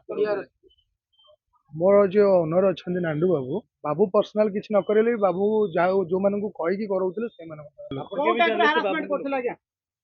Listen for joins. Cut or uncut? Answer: cut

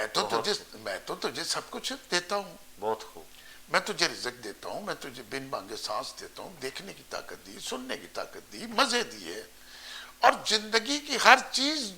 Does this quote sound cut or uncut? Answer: uncut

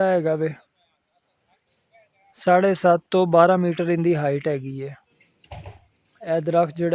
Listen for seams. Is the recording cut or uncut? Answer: uncut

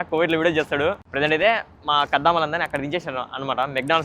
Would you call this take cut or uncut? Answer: uncut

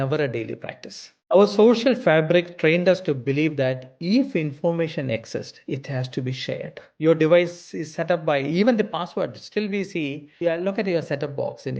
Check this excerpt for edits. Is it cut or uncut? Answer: cut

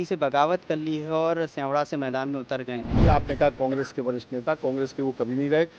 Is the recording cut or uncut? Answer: cut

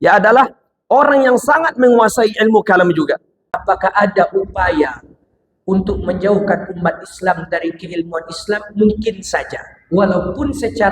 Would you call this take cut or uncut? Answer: cut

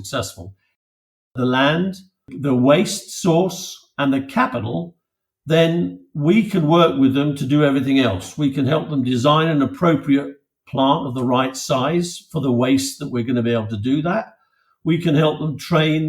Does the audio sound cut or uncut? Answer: cut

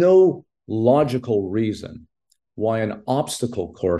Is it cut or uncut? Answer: uncut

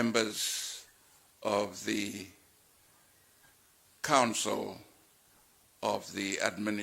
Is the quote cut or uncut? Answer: uncut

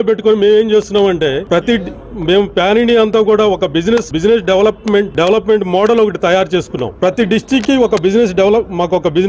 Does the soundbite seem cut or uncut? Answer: cut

